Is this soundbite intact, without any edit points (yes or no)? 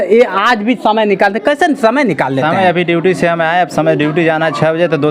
yes